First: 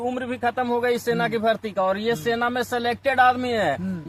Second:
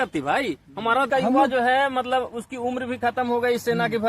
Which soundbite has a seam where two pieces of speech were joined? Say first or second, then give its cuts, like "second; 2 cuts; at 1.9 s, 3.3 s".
second; 1 cut; at 1.1 s